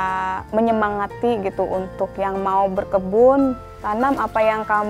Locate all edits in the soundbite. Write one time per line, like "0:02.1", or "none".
0:03.7